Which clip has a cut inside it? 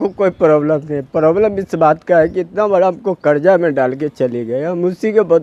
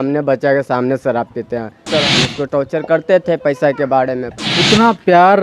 second; 2 cuts; at 1.9 s, 4.3 s

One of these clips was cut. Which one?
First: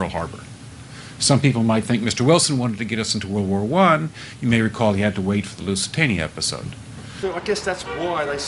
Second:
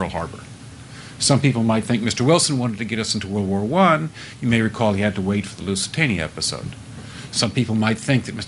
second; 1 cut; at 7.1 s

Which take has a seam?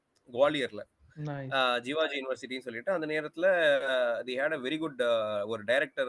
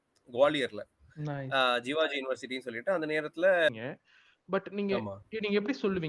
second; 1 cut; at 3.7 s

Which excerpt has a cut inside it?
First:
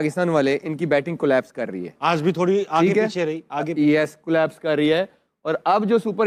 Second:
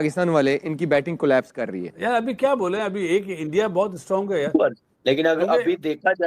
second; 2 cuts; at 1.8 s, 4.9 s

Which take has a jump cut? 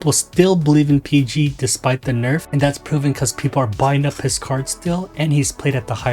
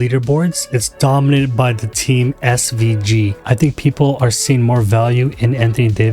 second; 1 cut; at 3.4 s

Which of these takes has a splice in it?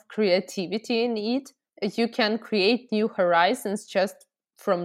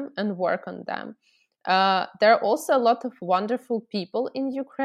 first; 1 cut; at 1.6 s

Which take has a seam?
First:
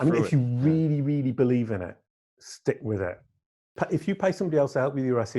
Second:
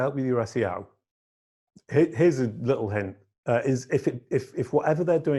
first; 1 cut; at 3.8 s

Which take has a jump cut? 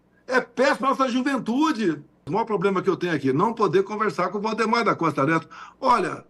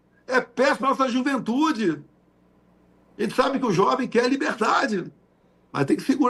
first; 1 cut; at 2.3 s

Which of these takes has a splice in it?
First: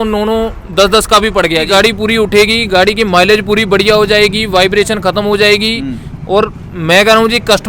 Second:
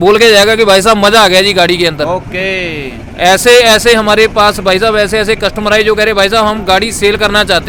first; 1 cut; at 1.7 s

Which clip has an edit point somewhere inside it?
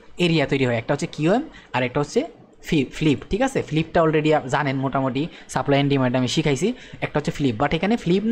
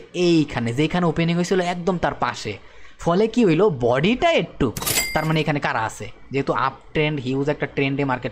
second; 1 cut; at 4.9 s

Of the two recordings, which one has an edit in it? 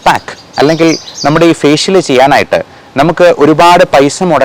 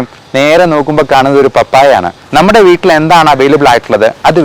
second; 1 cut; at 2.2 s

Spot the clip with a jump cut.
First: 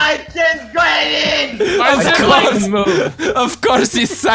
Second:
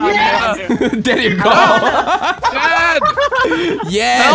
second; 1 cut; at 2.4 s

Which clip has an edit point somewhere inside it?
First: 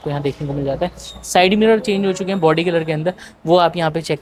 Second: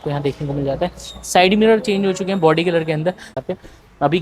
second; 1 cut; at 3.3 s

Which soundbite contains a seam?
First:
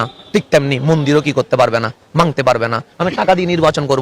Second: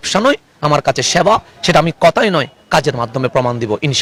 first; 1 cut; at 2.8 s

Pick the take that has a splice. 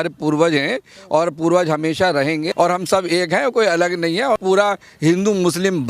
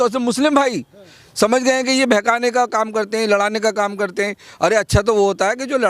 first; 2 cuts; at 2.5 s, 4.4 s

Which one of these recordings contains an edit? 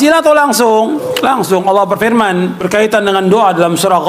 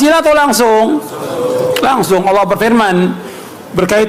first; 2 cuts; at 1.1 s, 2.6 s

